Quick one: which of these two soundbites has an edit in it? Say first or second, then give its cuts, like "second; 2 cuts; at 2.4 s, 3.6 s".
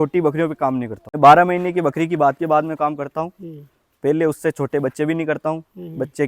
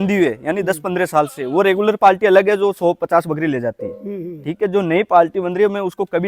first; 1 cut; at 1.2 s